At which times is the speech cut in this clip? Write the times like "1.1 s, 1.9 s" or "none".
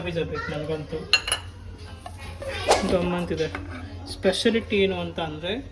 2.6 s